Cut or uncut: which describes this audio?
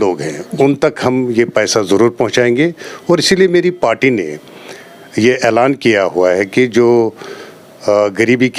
uncut